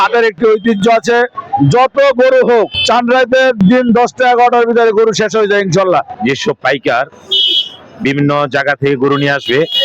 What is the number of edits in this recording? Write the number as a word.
two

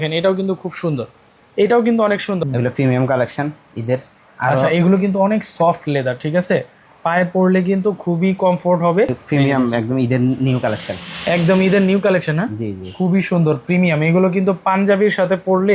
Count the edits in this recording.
three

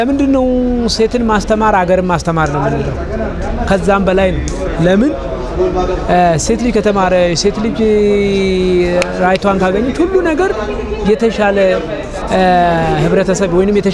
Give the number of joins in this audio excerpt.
zero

